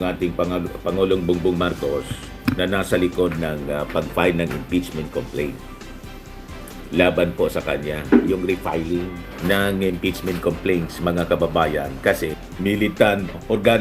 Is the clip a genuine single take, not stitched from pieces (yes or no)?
yes